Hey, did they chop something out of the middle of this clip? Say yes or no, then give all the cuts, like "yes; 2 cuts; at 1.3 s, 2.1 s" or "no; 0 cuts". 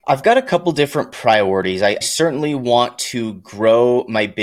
yes; 1 cut; at 2.0 s